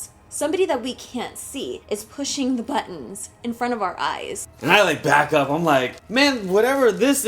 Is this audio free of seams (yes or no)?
no